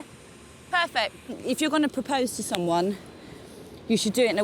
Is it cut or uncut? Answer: cut